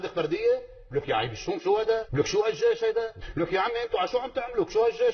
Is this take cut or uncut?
cut